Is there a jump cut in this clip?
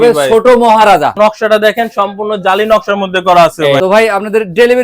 yes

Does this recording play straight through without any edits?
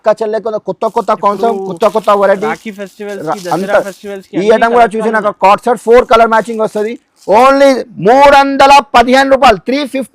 yes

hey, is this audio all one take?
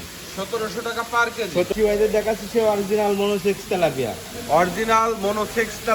no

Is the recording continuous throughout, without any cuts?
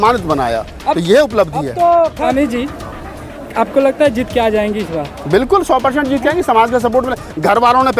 no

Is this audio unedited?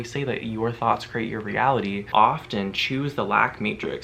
no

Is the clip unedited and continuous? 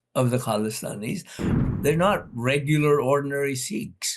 no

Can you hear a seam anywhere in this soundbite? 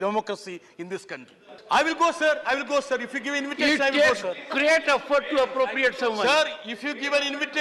yes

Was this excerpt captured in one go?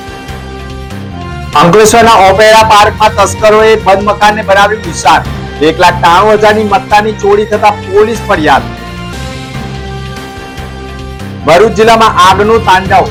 yes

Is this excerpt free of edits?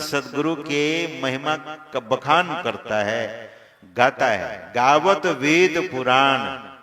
yes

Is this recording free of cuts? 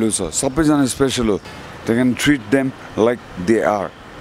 no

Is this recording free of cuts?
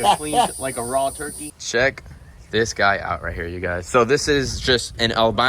no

